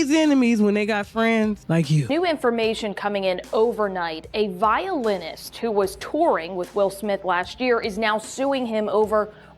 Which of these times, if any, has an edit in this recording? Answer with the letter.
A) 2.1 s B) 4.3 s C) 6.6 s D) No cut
A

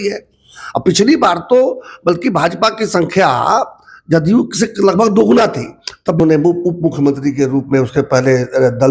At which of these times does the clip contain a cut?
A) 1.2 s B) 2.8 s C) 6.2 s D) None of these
C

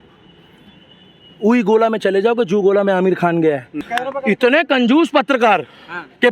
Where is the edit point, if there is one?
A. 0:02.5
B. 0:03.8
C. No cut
B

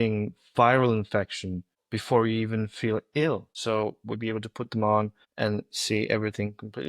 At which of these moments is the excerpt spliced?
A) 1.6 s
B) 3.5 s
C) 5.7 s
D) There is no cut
B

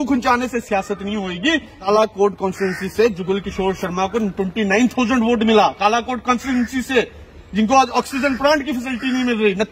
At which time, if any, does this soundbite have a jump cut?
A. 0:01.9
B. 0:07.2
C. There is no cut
A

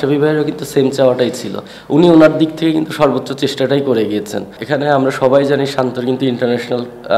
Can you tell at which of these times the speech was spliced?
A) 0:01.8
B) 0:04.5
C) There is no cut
B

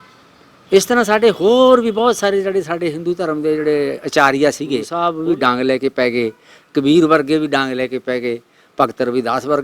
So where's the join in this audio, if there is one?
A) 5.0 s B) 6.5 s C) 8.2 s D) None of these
A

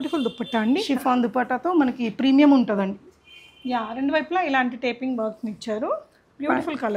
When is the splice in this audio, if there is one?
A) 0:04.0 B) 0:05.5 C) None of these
C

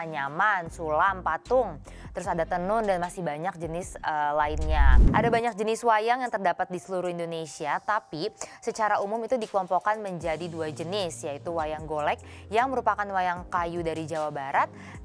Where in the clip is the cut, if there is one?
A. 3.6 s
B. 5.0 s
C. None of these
B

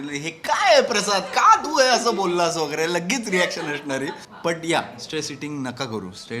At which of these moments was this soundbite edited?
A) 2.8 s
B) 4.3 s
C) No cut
B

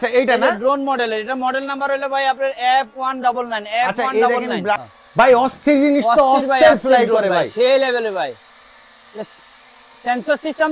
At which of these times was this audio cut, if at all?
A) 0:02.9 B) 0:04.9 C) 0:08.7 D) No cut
B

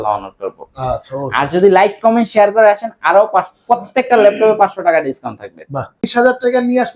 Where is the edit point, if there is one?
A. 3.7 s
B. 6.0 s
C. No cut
B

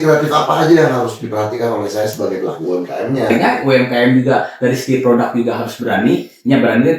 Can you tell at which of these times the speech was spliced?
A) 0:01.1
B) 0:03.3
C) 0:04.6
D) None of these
B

